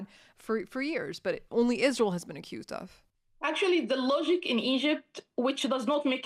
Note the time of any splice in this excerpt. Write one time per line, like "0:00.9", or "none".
none

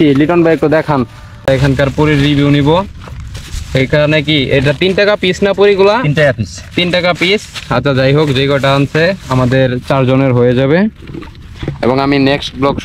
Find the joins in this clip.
0:01.4

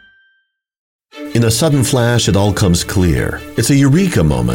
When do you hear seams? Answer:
0:00.9

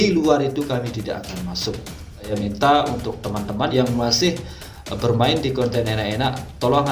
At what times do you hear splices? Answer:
0:02.3
0:03.7

